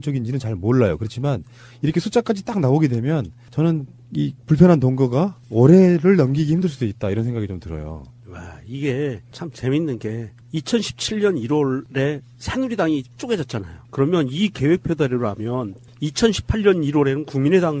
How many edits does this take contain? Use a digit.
1